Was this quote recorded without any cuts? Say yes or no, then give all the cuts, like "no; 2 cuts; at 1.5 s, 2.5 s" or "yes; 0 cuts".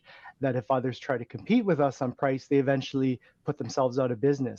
yes; 0 cuts